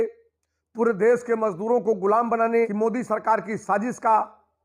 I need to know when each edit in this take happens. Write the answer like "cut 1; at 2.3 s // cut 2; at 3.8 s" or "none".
cut 1; at 2.7 s